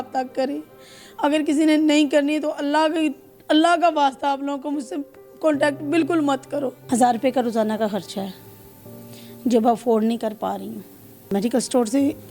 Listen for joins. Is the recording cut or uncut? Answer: cut